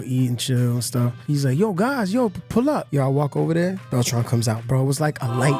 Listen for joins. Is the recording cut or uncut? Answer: cut